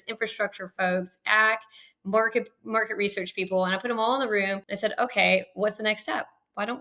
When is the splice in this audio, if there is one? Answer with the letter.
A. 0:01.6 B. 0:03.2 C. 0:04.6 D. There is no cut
C